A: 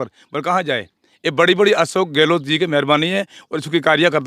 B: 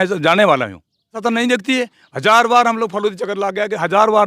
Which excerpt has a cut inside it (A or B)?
B